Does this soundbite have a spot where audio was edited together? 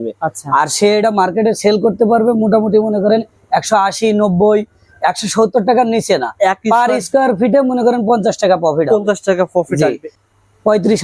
yes; 1 cut; at 10.1 s

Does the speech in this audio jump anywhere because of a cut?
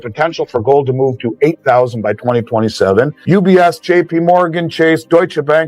yes; 1 cut; at 3.2 s

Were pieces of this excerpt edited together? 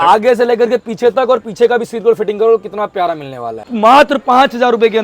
yes; 1 cut; at 3.7 s

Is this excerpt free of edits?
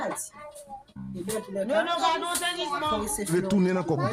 yes; 0 cuts

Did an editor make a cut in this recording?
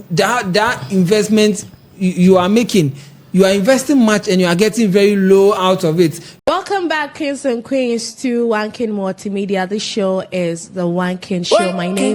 yes; 1 cut; at 6.4 s

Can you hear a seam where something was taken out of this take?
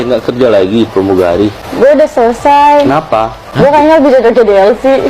yes; 2 cuts; at 1.6 s, 3.4 s

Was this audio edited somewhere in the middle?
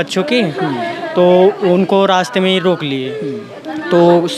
no; 0 cuts

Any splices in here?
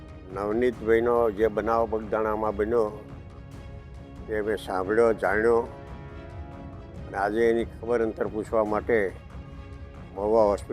yes; 2 cuts; at 5.7 s, 7.0 s

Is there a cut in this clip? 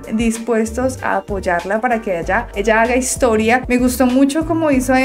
no; 0 cuts

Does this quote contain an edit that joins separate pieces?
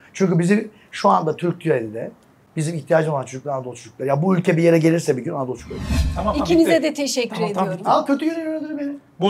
yes; 1 cut; at 5.9 s

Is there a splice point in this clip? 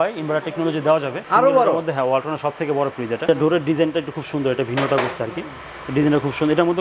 yes; 2 cuts; at 1.2 s, 3.2 s

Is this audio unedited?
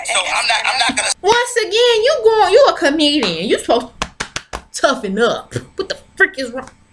no; 1 cut; at 1.1 s

